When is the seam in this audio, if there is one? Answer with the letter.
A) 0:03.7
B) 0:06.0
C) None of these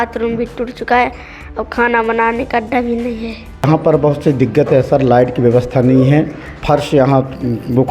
A